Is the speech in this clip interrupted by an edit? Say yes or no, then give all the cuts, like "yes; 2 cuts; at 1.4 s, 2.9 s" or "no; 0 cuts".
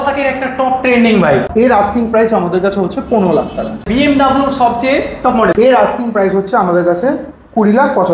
yes; 3 cuts; at 1.5 s, 3.8 s, 5.5 s